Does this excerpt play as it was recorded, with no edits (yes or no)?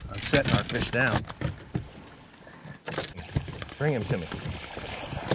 no